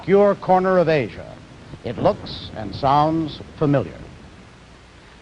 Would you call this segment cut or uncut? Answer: uncut